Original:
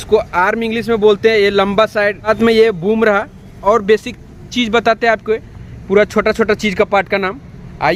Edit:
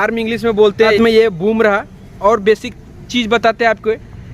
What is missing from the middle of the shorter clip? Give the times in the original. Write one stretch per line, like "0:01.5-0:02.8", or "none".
0:01.4-0:02.4